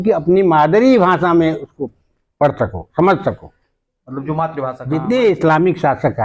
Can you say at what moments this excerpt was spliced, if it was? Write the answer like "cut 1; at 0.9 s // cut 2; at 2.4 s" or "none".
cut 1; at 4.8 s